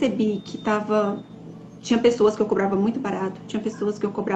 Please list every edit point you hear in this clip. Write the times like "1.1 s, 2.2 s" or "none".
none